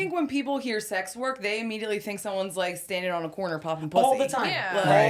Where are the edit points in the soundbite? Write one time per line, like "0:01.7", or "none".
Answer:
none

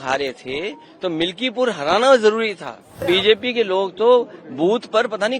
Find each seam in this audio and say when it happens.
0:03.0

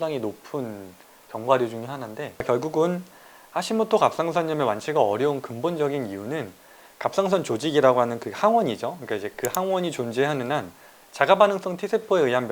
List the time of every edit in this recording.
0:02.3

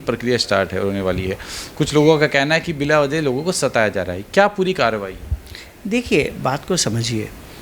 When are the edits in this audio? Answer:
none

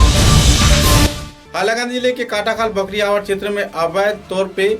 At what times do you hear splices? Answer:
0:01.2

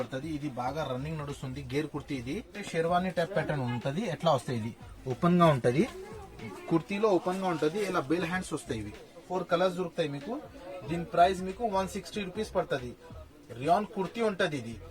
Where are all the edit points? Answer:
0:02.6
0:09.3

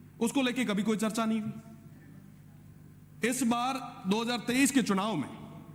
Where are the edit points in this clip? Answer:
none

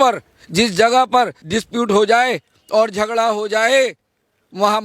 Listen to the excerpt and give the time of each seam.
0:01.4

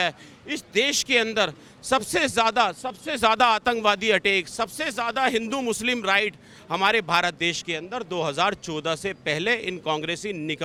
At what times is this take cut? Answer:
none

